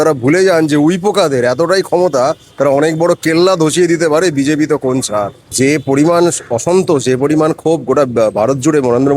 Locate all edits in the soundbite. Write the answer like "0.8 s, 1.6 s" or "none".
5.5 s